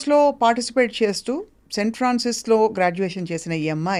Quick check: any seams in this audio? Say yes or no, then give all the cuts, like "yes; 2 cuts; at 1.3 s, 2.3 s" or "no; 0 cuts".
no; 0 cuts